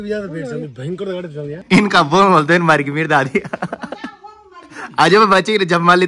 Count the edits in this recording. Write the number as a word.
one